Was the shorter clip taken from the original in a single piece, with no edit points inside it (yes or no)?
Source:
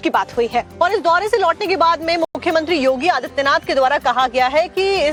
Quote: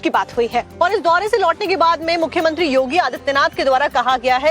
no